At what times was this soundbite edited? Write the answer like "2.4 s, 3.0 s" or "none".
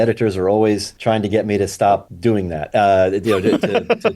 0.9 s, 2.1 s